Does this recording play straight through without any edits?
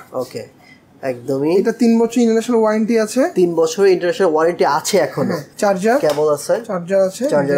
no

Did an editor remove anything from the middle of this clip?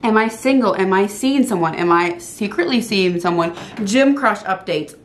no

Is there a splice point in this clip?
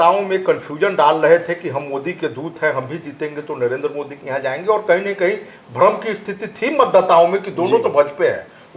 no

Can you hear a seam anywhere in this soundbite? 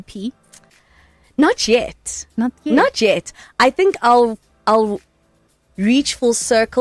no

